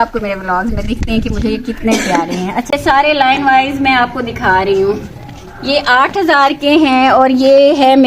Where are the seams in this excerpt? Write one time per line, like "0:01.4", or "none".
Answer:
0:02.7